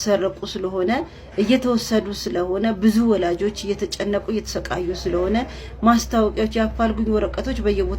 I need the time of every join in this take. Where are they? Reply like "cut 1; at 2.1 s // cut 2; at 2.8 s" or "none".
none